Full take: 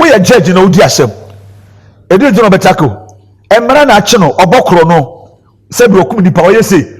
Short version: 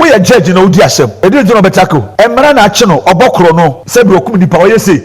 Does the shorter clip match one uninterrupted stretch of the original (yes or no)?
no